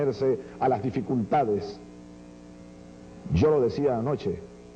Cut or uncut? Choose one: cut